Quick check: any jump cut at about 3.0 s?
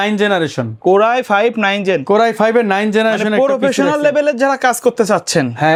no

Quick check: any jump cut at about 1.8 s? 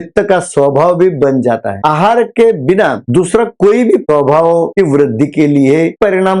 yes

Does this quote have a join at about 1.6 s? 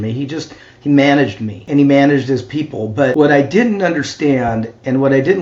yes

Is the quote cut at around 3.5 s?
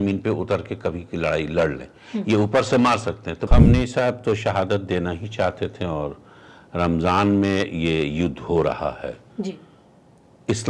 yes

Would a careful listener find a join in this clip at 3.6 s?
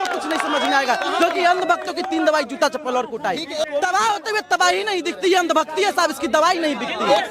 yes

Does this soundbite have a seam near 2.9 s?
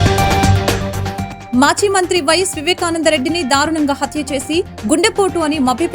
no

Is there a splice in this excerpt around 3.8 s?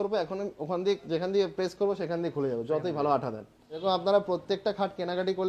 yes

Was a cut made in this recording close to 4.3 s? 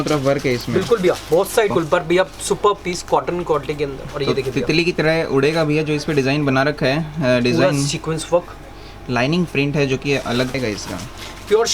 no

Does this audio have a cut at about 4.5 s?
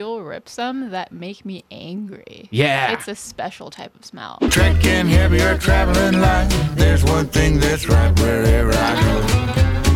yes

